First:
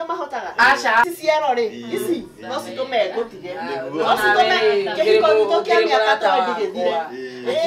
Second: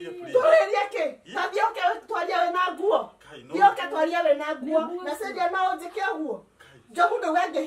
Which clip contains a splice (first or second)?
first